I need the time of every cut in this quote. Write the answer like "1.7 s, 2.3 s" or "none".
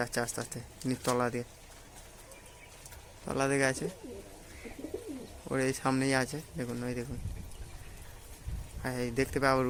none